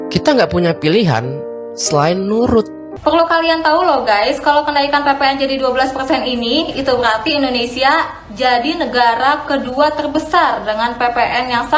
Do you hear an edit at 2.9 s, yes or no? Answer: yes